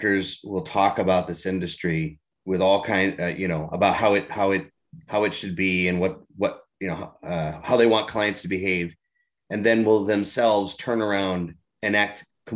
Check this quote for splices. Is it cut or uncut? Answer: cut